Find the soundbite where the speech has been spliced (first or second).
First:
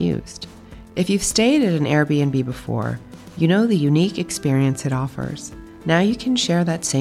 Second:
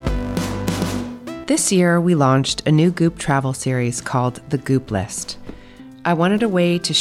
second